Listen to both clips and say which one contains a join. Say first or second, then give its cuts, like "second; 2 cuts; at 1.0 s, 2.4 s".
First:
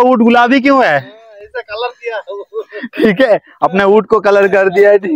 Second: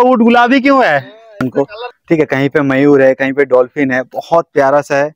second; 1 cut; at 1.4 s